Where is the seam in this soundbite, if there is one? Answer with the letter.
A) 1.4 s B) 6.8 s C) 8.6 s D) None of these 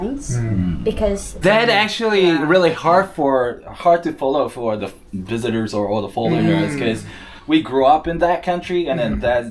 A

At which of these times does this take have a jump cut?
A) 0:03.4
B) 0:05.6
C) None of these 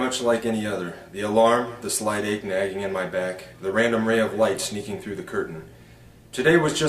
B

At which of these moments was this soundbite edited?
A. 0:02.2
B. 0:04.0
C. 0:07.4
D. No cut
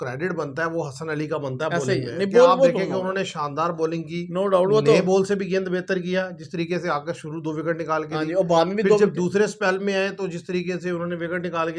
D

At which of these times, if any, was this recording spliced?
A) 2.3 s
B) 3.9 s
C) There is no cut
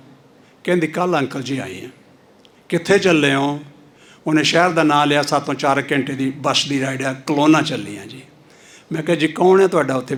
C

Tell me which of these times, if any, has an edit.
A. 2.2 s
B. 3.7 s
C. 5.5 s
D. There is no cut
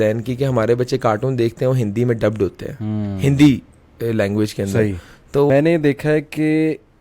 C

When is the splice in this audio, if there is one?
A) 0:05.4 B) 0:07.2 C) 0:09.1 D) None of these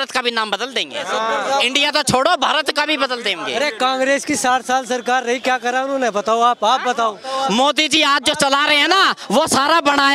B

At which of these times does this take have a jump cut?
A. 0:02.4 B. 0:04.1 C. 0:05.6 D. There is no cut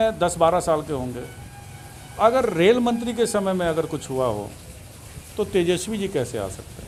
D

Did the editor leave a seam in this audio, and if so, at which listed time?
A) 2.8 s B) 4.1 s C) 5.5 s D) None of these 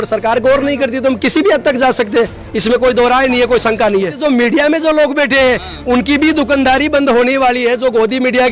B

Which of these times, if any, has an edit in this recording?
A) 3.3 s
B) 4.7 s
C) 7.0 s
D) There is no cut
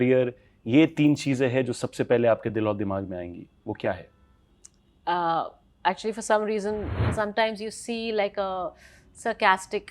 C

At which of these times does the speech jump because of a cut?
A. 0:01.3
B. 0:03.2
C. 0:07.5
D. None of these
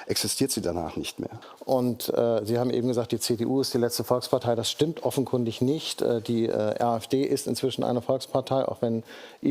A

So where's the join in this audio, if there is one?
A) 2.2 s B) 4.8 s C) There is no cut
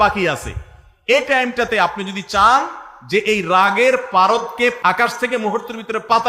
B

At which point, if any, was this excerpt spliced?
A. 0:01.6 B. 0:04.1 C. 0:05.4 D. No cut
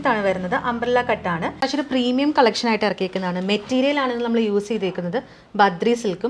A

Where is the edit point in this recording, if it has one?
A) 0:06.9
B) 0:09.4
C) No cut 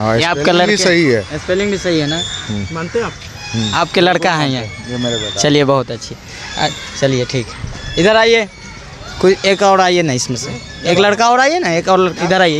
C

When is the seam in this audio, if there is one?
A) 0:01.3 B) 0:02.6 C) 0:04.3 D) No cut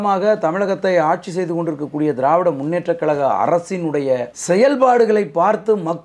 C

